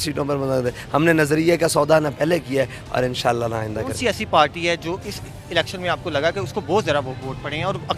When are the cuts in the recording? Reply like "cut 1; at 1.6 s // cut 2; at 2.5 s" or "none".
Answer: none